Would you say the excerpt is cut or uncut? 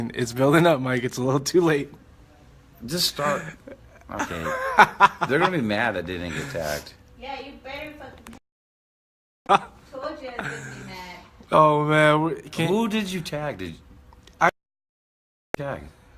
uncut